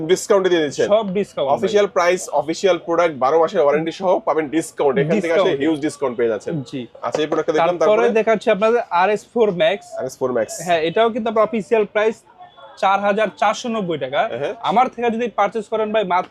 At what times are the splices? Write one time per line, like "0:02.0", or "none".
none